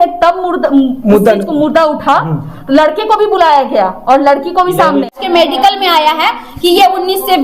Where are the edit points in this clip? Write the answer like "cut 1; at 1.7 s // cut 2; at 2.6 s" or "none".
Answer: cut 1; at 5.1 s